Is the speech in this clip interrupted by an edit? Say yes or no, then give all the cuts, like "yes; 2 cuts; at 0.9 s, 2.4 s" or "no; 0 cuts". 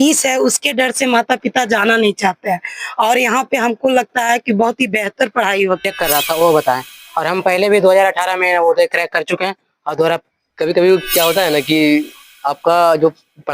yes; 2 cuts; at 5.8 s, 10.3 s